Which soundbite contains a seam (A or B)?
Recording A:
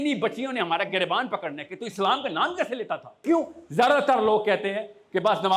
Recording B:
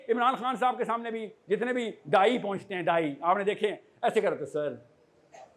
A